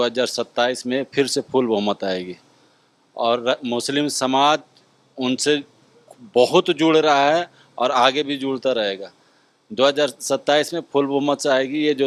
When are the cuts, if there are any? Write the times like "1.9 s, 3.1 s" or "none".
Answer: none